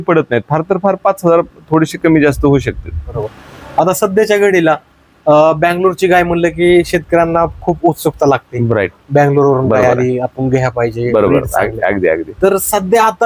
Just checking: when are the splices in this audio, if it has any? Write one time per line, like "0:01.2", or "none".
none